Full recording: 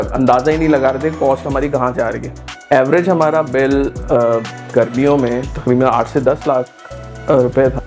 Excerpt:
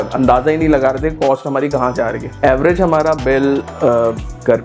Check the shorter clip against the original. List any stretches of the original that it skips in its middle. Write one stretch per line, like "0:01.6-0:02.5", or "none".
0:02.2-0:02.5